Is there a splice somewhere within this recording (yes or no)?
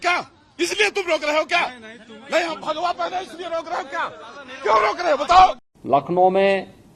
yes